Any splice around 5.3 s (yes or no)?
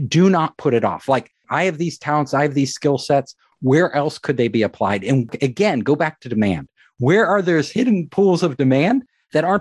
yes